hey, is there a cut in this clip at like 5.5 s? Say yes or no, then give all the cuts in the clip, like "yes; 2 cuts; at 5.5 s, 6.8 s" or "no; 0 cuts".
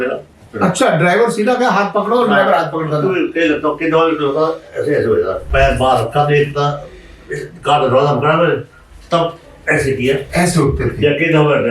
yes; 1 cut; at 5.5 s